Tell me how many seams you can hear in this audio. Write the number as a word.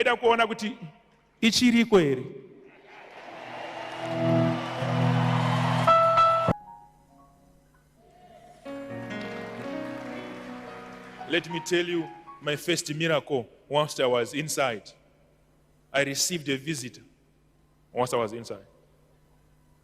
one